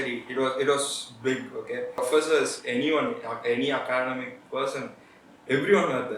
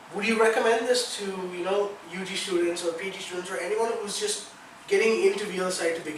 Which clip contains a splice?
first; 1 cut; at 2.0 s

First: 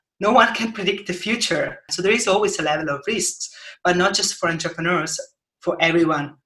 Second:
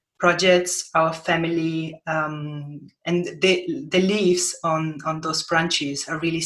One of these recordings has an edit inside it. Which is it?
first; 1 cut; at 1.9 s

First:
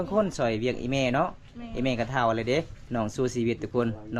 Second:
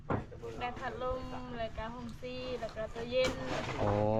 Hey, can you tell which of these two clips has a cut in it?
first; 1 cut; at 2.8 s

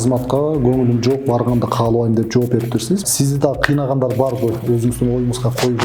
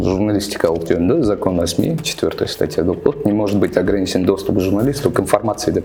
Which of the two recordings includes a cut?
first; 1 cut; at 3.1 s

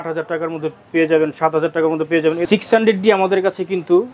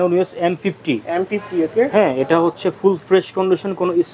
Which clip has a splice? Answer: first; 1 cut; at 2.4 s

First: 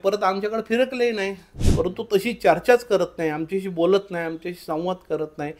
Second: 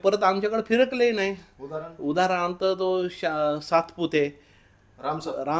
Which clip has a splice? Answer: first; 1 cut; at 1.6 s

